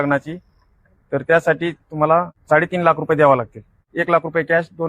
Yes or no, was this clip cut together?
yes